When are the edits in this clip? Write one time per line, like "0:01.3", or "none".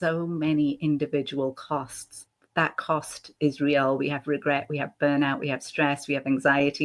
0:02.2